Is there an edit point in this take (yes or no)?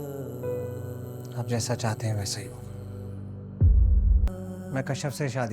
yes